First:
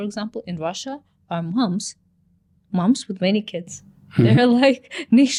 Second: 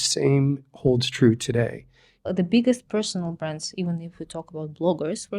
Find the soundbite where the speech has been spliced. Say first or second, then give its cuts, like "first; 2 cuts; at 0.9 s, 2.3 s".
second; 1 cut; at 2.2 s